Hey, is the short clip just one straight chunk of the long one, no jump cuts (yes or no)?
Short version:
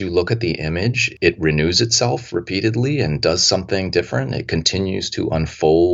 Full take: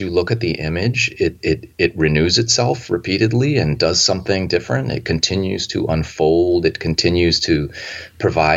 no